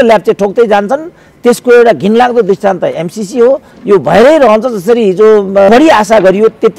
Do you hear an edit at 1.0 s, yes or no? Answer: no